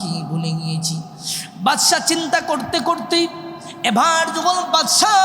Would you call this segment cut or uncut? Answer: uncut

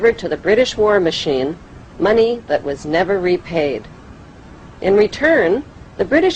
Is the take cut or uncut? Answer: cut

